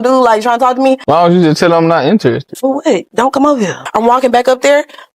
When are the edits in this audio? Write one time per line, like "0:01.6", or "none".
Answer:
0:01.0
0:02.5
0:03.8